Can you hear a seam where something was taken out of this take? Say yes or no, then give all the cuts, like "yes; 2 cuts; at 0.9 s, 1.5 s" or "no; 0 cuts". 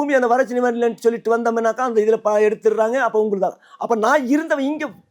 no; 0 cuts